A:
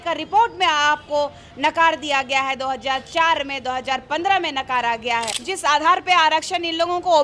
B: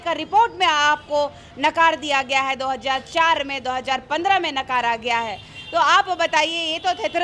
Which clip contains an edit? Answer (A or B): A